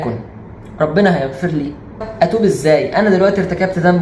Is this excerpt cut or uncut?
cut